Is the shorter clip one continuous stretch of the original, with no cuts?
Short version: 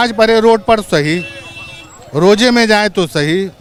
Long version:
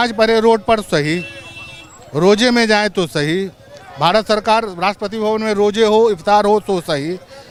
yes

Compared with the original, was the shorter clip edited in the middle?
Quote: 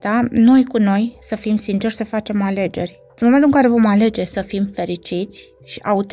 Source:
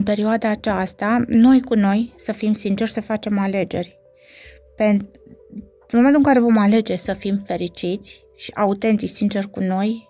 yes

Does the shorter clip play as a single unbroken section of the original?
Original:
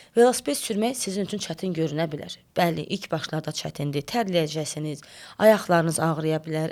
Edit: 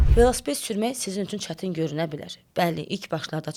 yes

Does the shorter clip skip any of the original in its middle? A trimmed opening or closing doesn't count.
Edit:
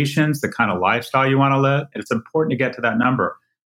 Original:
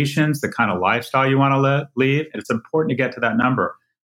yes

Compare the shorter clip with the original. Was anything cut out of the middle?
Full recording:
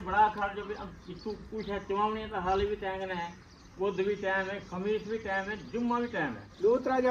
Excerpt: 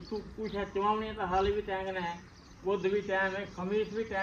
no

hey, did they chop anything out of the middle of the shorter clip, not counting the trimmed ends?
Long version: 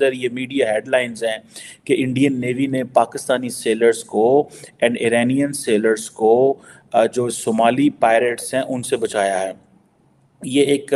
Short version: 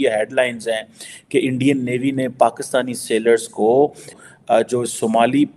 yes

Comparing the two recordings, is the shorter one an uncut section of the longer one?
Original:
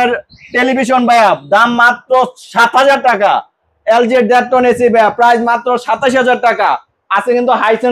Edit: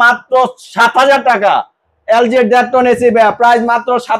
yes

